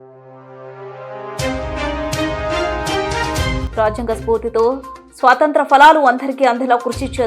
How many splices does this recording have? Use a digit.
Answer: 1